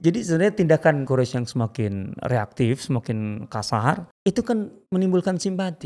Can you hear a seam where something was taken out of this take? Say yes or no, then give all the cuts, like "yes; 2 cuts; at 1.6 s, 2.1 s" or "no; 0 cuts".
yes; 2 cuts; at 1.0 s, 4.1 s